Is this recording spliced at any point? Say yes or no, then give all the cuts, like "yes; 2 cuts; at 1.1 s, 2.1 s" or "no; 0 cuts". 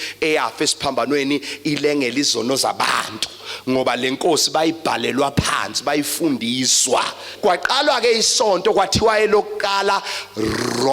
yes; 1 cut; at 7.3 s